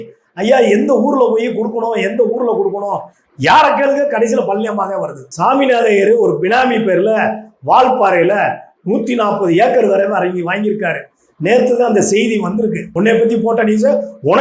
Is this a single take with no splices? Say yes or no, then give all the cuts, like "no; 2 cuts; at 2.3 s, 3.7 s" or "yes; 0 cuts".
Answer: no; 2 cuts; at 5.2 s, 12.9 s